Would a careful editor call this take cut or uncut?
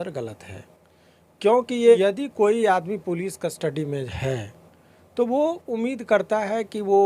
cut